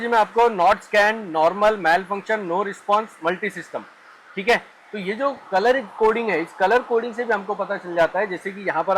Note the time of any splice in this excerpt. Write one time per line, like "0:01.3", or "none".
none